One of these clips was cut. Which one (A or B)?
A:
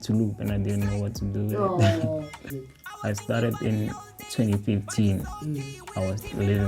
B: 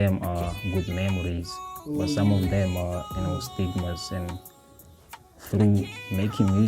A